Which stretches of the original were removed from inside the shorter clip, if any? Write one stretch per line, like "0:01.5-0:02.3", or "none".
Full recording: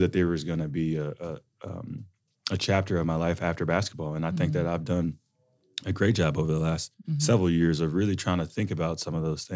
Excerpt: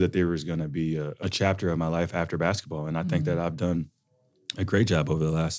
0:01.1-0:02.4